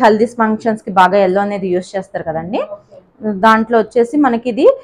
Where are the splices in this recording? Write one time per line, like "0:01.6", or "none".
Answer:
none